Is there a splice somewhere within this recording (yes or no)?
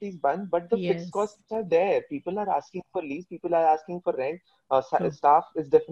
no